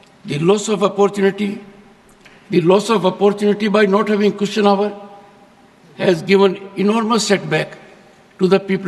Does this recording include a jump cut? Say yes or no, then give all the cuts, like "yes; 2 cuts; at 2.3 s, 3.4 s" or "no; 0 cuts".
no; 0 cuts